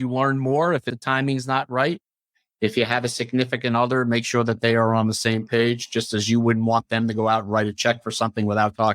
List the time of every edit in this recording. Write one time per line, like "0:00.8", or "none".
0:00.9